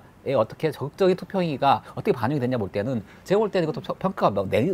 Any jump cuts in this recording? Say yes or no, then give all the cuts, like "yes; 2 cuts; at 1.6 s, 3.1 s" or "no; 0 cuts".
no; 0 cuts